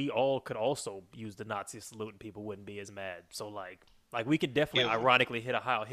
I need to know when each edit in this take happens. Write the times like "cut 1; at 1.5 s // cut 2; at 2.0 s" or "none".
cut 1; at 3.8 s